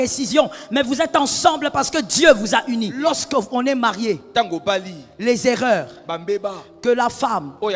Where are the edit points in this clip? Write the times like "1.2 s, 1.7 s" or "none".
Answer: 2.9 s